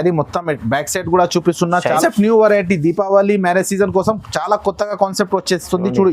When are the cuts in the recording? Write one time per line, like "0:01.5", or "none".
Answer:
0:02.0